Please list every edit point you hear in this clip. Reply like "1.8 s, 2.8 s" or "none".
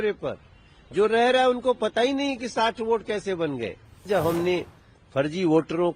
4.1 s

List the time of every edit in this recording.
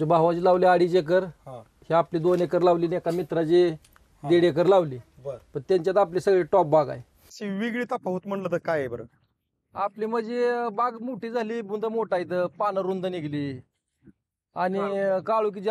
7.4 s

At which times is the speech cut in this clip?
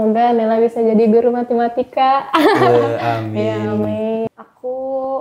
4.2 s

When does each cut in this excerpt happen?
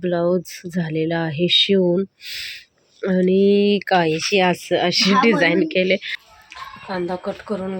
6.1 s

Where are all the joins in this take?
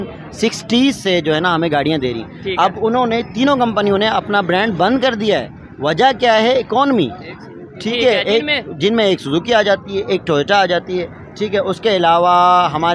none

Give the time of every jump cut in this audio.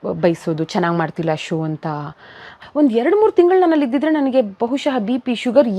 2.5 s

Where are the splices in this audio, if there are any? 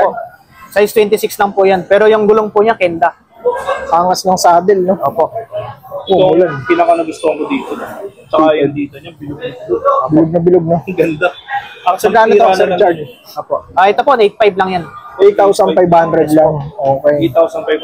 none

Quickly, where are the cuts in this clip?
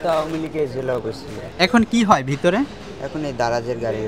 1.7 s

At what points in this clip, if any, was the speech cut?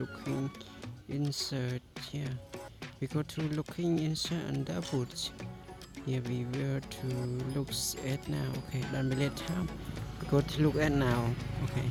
none

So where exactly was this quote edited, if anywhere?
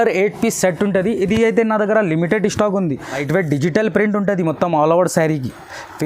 3.2 s

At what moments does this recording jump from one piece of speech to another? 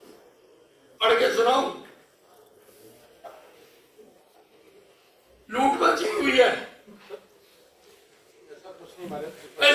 none

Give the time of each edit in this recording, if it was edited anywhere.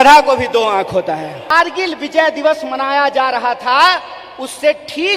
1.5 s

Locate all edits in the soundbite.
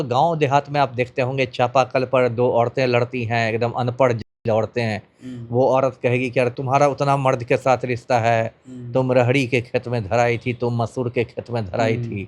6.6 s

